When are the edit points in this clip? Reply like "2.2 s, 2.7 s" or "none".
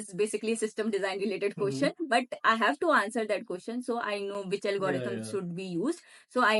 none

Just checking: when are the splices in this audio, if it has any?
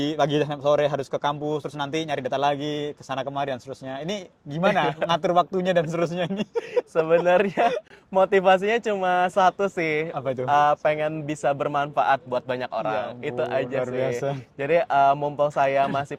none

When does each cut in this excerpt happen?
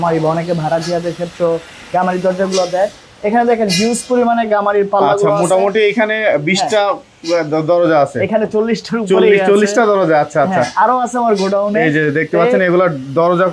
none

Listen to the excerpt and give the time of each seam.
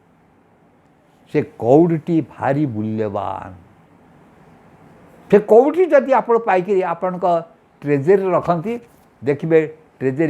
none

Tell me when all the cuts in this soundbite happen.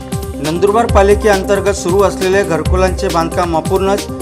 none

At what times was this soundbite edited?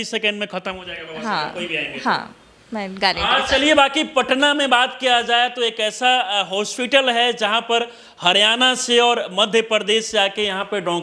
none

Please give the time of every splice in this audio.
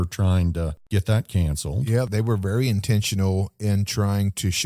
0.8 s, 2.1 s

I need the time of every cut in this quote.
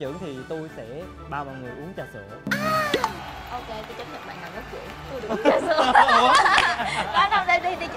none

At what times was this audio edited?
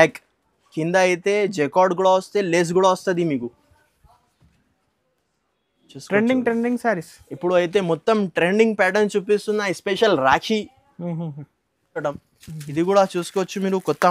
12.0 s

